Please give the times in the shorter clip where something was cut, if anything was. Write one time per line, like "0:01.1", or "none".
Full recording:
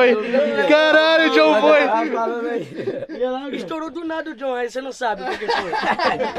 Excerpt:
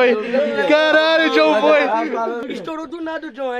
0:02.4